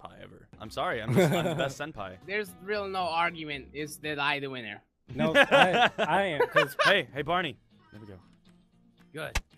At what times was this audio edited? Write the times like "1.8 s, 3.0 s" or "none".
1.2 s